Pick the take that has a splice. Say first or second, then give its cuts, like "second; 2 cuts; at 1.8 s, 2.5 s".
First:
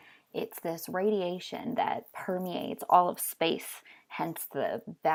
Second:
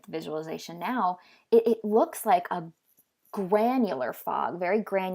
second; 1 cut; at 3.7 s